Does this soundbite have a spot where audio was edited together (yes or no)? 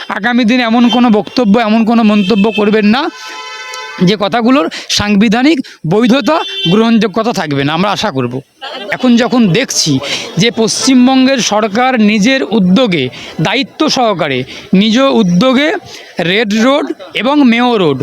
yes